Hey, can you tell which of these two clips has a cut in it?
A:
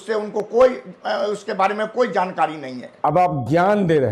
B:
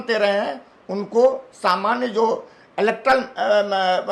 A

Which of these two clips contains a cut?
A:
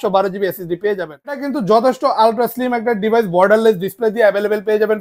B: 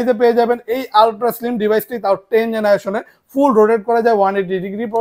A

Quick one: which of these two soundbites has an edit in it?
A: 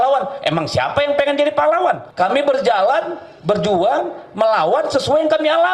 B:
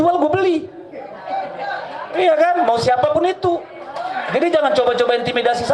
A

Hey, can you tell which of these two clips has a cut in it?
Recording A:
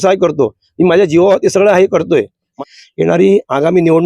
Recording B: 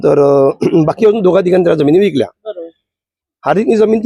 A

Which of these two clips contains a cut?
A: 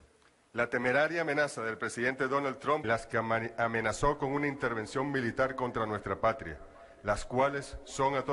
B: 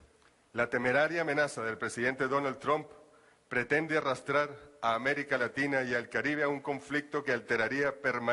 B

